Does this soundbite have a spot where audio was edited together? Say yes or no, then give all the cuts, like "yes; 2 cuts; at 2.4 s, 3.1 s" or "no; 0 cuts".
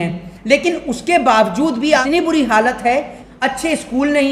yes; 2 cuts; at 2.0 s, 3.2 s